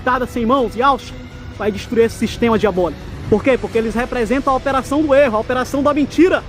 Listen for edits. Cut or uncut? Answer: cut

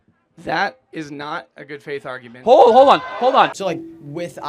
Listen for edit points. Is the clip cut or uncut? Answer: cut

